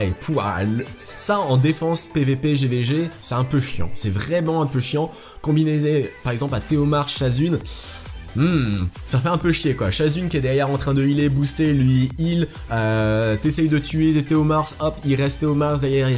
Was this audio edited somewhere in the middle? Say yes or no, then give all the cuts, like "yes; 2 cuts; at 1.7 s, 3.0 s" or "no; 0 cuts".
no; 0 cuts